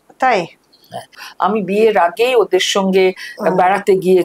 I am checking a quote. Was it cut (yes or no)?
yes